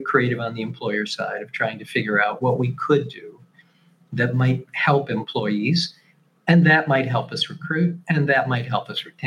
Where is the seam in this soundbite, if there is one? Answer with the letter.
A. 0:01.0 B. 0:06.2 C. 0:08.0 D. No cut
D